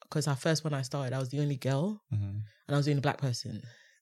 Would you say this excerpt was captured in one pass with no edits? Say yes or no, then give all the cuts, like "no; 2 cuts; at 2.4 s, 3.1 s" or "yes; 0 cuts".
yes; 0 cuts